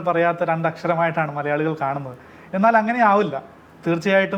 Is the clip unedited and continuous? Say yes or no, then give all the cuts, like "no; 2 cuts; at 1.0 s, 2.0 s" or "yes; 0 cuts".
yes; 0 cuts